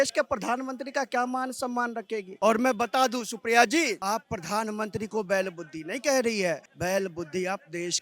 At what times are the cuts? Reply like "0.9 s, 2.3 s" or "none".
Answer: 2.2 s, 6.7 s